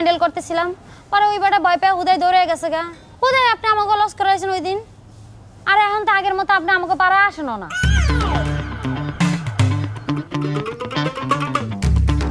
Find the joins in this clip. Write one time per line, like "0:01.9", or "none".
0:07.9